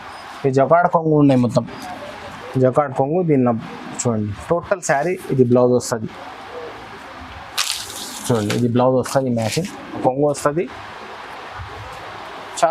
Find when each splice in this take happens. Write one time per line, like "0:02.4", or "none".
0:10.0